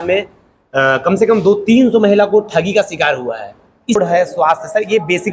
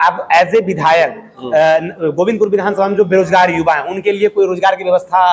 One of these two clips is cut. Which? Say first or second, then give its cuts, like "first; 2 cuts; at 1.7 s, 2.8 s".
first; 1 cut; at 4.0 s